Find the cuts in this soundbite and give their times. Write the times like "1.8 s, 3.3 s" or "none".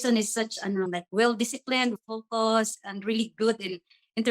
2.0 s